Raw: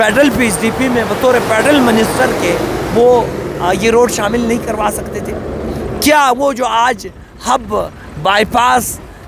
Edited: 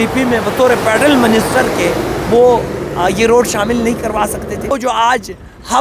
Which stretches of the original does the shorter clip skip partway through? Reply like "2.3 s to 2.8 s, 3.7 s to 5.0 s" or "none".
5.4 s to 6.5 s